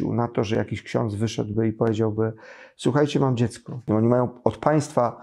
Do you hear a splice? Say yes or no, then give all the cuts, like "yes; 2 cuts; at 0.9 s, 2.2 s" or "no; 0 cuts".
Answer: yes; 1 cut; at 3.9 s